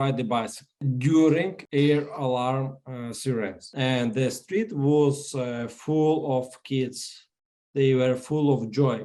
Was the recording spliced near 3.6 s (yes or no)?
no